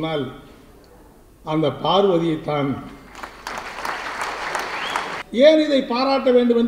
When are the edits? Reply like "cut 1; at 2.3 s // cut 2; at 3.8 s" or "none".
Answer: cut 1; at 5.2 s